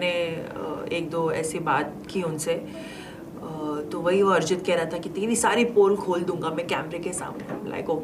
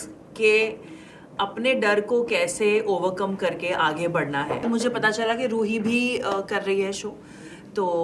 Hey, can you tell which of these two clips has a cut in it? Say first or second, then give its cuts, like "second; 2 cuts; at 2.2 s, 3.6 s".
second; 1 cut; at 4.6 s